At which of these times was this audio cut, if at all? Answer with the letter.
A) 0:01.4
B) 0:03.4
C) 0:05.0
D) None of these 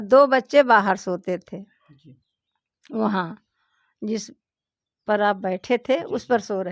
D